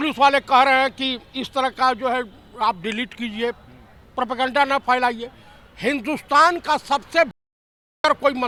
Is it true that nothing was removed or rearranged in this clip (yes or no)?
yes